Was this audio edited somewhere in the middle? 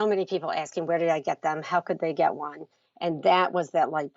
no; 0 cuts

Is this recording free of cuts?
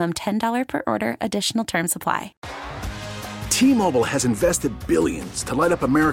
no; 1 cut; at 2.4 s

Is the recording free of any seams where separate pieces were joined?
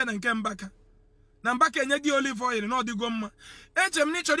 yes; 0 cuts

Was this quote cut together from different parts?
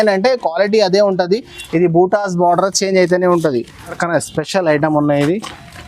yes; 1 cut; at 4.0 s

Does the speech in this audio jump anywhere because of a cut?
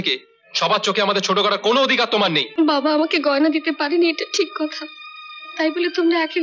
yes; 1 cut; at 2.5 s

